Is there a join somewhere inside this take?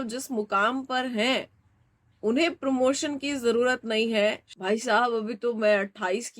yes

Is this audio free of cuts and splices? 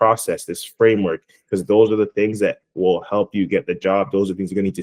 yes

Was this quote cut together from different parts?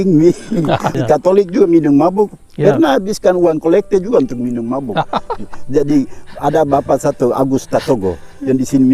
yes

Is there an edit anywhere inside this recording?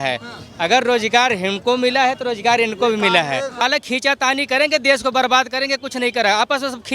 yes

